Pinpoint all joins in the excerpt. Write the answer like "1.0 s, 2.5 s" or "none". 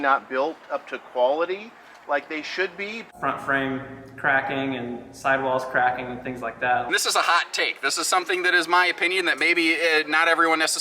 3.0 s, 6.9 s

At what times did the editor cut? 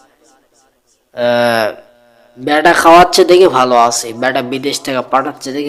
none

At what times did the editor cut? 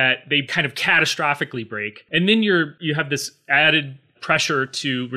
2.0 s, 2.8 s

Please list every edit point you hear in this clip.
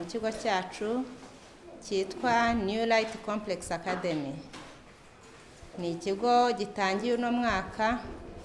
none

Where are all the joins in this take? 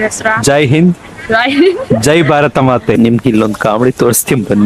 2.9 s

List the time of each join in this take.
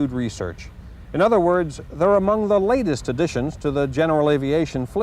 1.8 s

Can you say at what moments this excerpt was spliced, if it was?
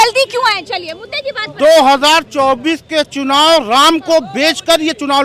none

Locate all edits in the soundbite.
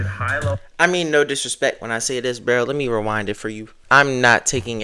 3.8 s

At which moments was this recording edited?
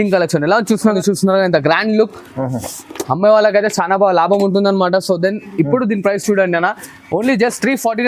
1.0 s

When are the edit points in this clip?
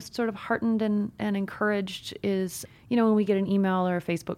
2.6 s

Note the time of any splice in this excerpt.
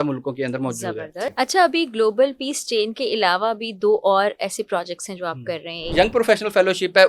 1.2 s, 5.9 s

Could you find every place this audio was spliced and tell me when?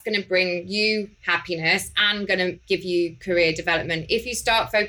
1.2 s, 2.6 s

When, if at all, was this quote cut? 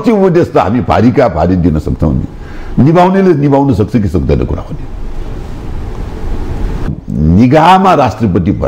6.9 s

